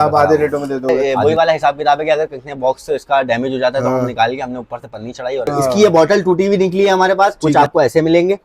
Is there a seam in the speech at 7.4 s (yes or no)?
yes